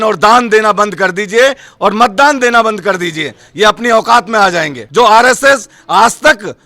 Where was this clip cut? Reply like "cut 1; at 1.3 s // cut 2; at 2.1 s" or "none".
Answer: cut 1; at 4.8 s